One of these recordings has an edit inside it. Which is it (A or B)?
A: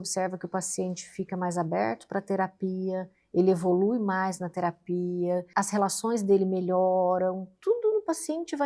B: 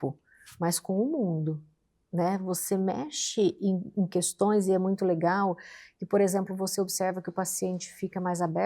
A